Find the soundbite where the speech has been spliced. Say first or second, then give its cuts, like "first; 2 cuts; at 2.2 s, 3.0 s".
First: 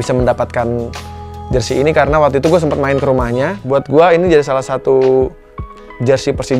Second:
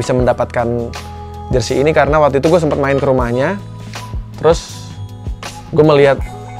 first; 1 cut; at 3.6 s